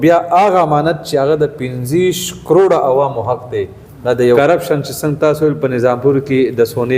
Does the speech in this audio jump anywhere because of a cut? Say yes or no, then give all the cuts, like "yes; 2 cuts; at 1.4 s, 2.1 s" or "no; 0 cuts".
yes; 1 cut; at 4.4 s